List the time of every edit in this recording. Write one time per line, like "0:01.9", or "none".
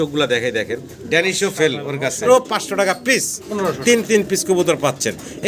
0:02.2